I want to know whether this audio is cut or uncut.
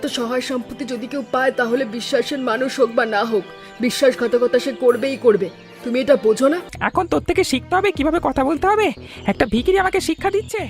cut